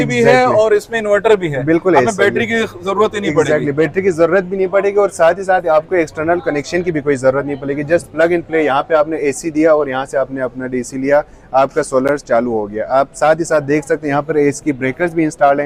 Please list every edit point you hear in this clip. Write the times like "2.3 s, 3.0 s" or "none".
none